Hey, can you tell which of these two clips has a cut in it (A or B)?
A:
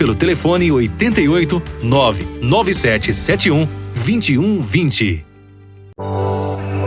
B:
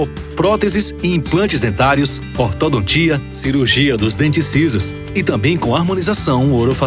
A